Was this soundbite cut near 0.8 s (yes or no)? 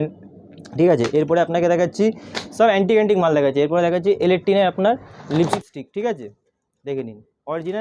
no